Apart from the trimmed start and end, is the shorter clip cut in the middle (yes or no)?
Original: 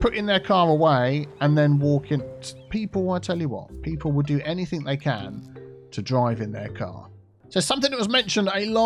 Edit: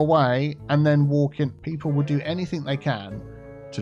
yes